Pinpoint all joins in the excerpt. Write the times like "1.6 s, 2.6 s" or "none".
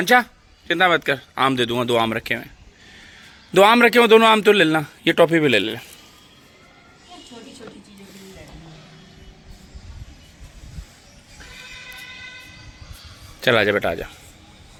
none